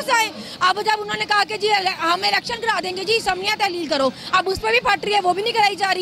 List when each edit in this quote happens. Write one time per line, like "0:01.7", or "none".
none